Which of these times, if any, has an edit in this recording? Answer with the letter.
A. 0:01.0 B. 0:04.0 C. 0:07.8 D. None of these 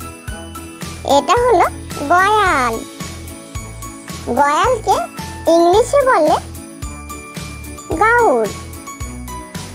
A